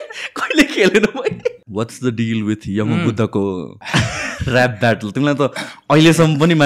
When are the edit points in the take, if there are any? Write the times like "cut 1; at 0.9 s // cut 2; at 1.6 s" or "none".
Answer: cut 1; at 1.6 s // cut 2; at 3.8 s